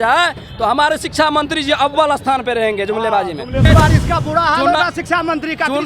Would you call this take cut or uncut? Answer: cut